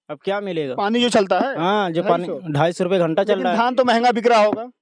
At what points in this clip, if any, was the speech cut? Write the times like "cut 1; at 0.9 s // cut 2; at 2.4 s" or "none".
none